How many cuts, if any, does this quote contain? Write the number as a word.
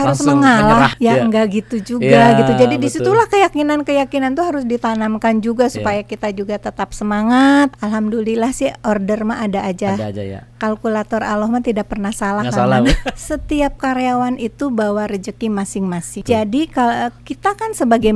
four